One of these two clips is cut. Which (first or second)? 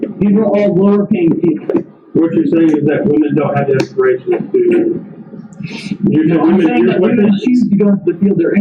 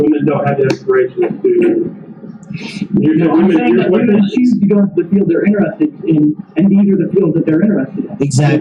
first